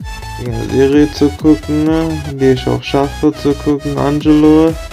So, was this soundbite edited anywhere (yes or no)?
no